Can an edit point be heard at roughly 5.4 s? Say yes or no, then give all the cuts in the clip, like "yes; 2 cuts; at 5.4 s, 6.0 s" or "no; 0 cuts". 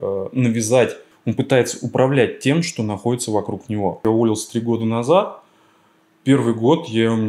no; 2 cuts; at 1.1 s, 4.0 s